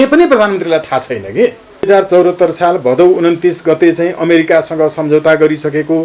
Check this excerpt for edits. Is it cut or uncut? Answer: cut